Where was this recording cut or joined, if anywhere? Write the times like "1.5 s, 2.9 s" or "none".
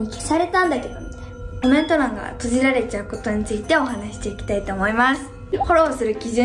1.6 s, 5.7 s

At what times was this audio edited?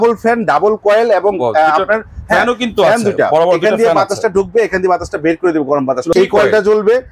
6.1 s

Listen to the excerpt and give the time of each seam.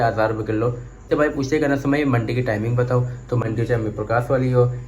1.1 s, 3.4 s

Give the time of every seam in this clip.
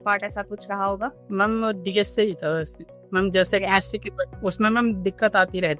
none

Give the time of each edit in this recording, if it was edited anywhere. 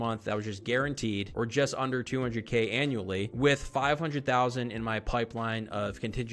none

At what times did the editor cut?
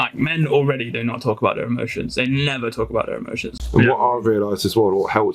3.5 s

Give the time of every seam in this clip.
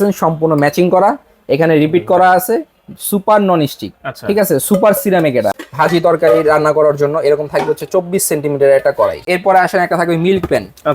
5.6 s, 9.2 s

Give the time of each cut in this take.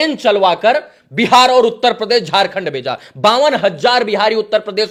none

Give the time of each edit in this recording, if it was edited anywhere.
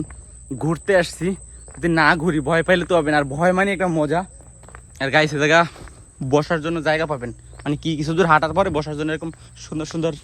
none

